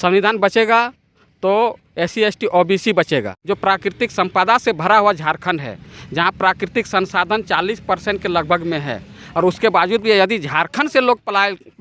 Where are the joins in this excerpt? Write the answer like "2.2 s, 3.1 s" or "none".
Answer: 3.4 s